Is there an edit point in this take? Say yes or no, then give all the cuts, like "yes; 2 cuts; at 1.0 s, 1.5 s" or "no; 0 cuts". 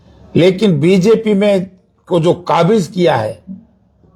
no; 0 cuts